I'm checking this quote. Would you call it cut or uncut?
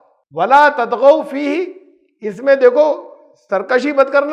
uncut